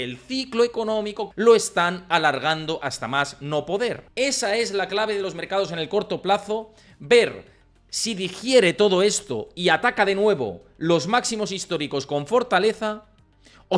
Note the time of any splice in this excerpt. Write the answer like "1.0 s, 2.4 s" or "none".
1.2 s, 4.1 s